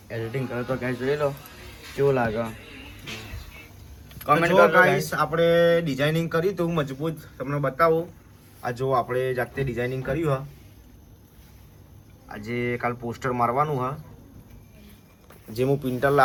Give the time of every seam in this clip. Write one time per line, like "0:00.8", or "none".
none